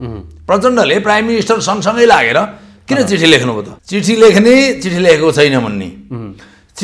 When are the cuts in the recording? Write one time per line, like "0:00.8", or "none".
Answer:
0:03.7